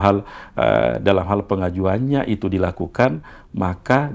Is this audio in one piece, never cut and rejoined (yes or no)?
yes